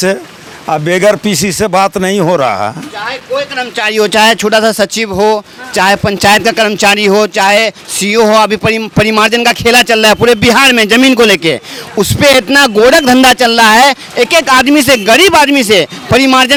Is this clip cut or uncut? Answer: uncut